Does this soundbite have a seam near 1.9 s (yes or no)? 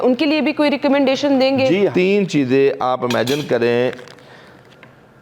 yes